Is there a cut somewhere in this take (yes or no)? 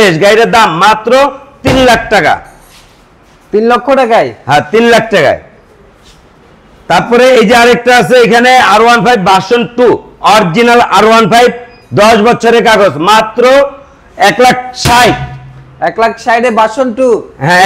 no